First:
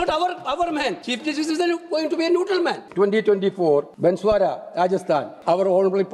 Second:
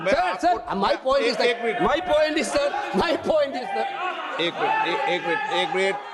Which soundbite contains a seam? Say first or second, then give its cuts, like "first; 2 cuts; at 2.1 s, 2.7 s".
first; 4 cuts; at 1.1 s, 2.8 s, 3.9 s, 5.3 s